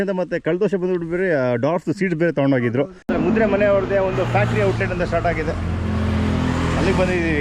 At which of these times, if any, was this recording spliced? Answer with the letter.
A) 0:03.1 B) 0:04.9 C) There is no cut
A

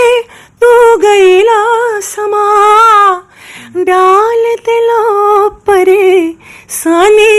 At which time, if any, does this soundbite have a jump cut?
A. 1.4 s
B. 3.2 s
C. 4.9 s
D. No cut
D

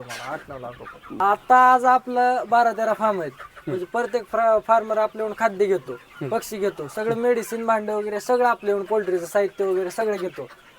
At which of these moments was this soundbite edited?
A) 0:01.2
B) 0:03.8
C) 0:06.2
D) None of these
A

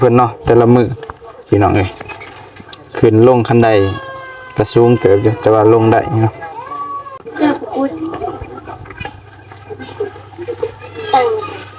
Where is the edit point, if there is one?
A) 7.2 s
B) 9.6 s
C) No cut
A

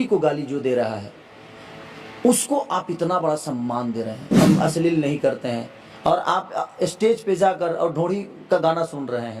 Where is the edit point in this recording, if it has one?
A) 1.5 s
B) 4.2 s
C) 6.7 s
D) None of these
B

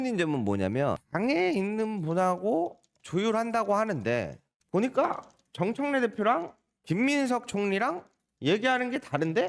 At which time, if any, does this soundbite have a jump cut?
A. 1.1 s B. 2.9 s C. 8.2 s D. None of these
A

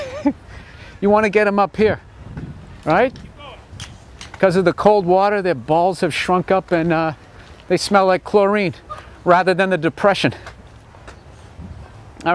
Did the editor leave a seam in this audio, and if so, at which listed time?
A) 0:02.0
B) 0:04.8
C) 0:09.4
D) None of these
A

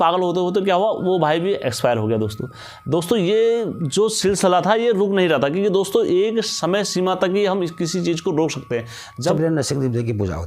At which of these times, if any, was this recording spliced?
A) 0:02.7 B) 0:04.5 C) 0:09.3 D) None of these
C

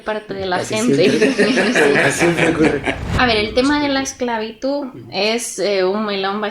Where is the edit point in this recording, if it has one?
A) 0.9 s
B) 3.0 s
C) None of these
B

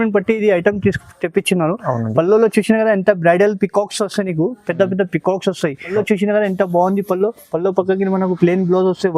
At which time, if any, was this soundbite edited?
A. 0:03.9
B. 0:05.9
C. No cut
B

